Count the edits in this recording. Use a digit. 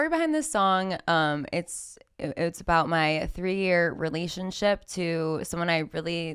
0